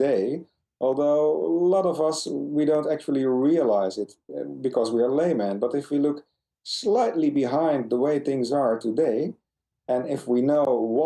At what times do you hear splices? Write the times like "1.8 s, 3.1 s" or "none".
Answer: none